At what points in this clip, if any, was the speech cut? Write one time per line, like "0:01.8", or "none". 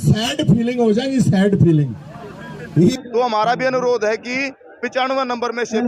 0:02.9